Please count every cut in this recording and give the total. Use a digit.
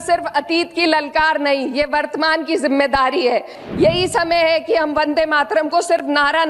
1